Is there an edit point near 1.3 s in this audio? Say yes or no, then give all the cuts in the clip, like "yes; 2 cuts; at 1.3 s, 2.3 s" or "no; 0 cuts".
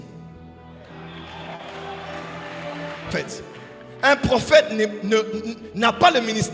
no; 1 cut; at 3.1 s